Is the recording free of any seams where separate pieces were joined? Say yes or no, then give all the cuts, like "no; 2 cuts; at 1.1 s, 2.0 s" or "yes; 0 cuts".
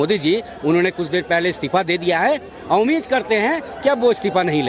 yes; 0 cuts